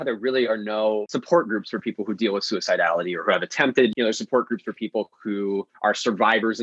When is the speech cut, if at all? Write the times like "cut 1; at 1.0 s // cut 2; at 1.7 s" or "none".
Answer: cut 1; at 1.1 s // cut 2; at 3.9 s // cut 3; at 5.7 s

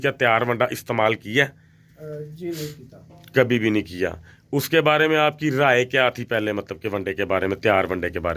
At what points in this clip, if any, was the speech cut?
none

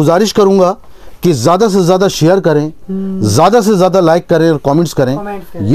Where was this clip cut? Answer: none

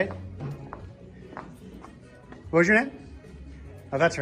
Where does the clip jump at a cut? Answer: none

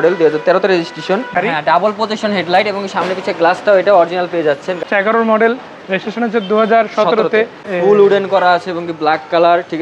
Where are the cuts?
cut 1; at 1.3 s // cut 2; at 4.8 s // cut 3; at 7.7 s

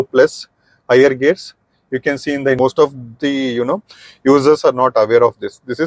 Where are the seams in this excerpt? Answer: cut 1; at 2.6 s

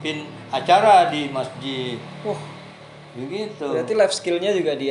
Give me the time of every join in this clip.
none

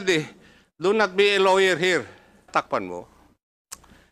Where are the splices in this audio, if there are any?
cut 1; at 2.5 s

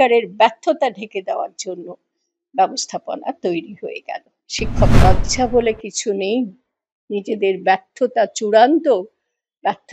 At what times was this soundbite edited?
cut 1; at 4.9 s

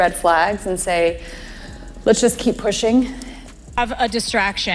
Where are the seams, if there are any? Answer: cut 1; at 3.8 s

